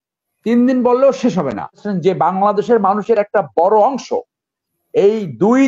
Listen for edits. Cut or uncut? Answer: cut